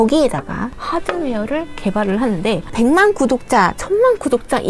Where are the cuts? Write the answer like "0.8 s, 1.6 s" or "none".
2.7 s